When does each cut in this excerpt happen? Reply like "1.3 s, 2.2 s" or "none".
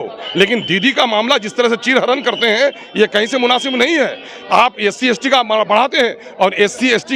none